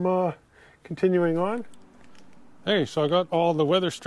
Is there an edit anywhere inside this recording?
yes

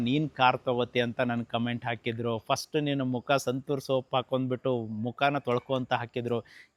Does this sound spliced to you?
no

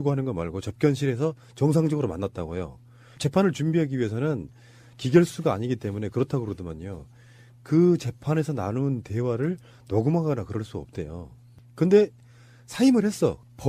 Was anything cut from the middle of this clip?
no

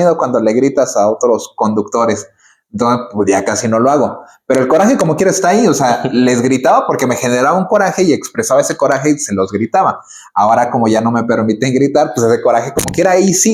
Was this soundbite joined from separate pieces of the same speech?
no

